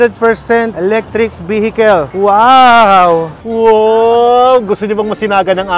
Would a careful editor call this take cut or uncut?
cut